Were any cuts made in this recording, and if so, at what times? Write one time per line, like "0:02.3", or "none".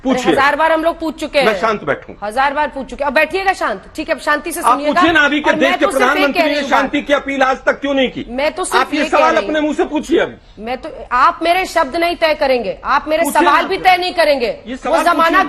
none